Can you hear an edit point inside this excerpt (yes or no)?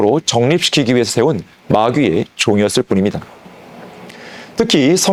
no